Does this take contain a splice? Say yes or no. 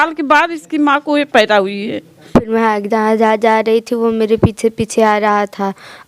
yes